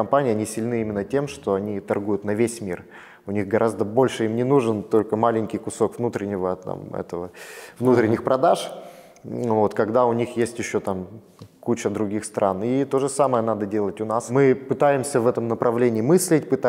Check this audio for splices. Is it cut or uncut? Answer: uncut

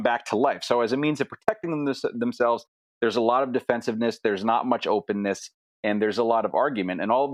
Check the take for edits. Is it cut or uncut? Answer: uncut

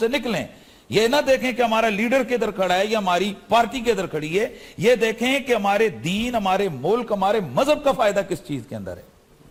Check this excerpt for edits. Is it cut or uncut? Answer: uncut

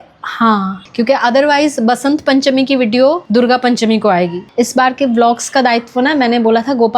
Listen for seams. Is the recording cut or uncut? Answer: cut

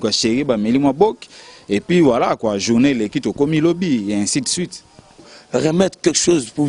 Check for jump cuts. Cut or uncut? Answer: cut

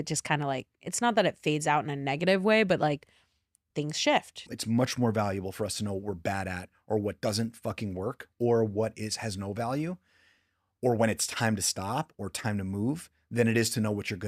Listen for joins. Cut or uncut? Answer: cut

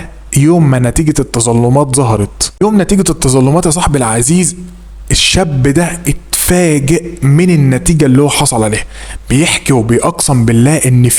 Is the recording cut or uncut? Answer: uncut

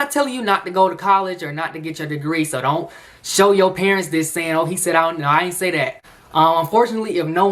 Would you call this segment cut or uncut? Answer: cut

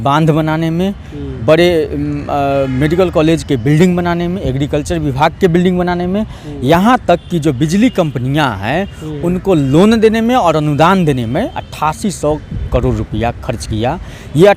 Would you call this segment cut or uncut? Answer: uncut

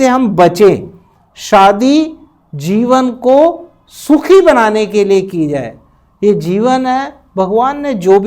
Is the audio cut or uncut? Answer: uncut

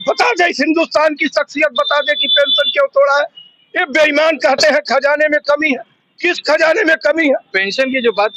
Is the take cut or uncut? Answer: uncut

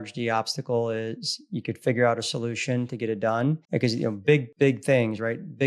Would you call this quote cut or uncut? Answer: cut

